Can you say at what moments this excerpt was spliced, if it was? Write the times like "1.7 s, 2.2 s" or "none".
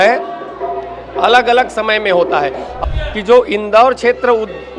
2.7 s